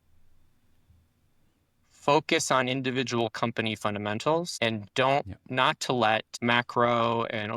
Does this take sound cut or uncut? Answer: cut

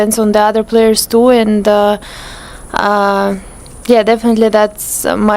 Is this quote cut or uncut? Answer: uncut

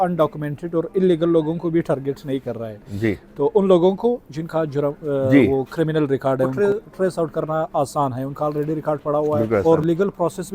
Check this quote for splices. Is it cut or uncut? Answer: cut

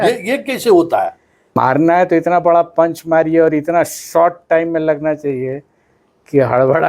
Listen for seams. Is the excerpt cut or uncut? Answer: cut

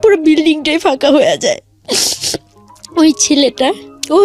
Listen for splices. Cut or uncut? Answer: uncut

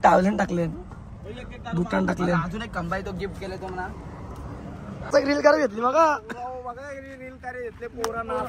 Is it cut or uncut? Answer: cut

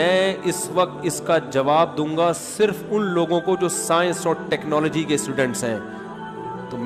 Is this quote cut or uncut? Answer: uncut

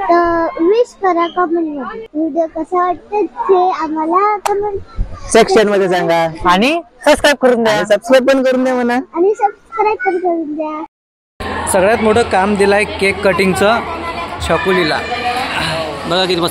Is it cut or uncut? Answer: cut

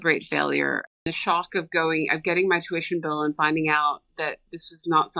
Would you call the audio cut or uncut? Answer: cut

